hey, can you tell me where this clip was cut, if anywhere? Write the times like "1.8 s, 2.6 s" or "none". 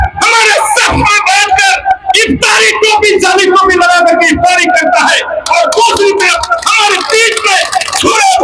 none